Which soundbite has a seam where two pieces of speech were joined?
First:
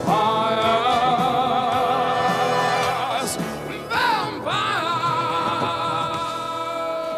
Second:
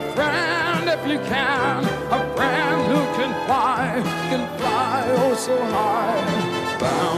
second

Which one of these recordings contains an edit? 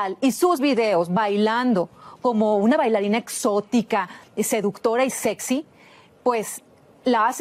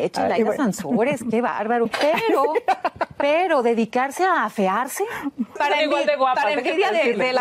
second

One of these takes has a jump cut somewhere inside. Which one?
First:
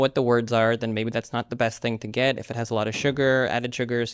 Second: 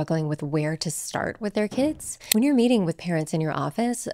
second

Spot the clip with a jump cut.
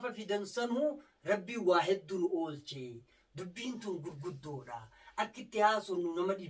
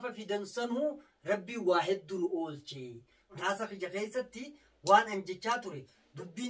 second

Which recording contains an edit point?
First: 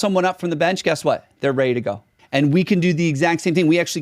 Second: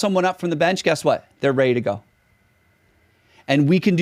first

